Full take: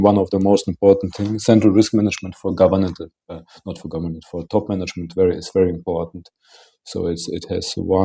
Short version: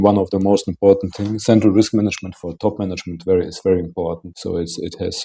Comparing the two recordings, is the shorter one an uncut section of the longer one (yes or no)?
no